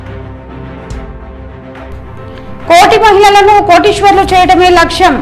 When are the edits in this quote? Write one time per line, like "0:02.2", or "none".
0:00.9
0:02.7